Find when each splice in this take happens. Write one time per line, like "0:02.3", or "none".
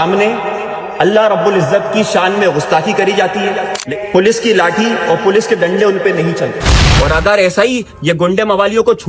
0:03.8